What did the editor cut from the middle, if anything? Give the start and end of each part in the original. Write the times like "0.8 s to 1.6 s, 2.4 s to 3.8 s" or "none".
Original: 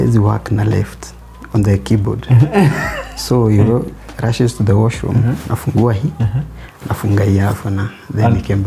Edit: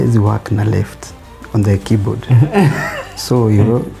none